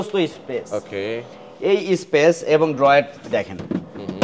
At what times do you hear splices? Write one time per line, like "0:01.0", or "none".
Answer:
none